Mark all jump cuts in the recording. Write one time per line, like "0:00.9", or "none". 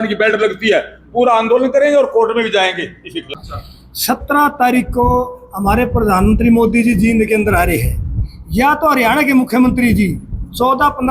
0:03.2